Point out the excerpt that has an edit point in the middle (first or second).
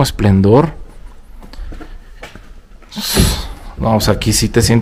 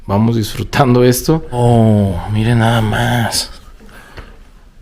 second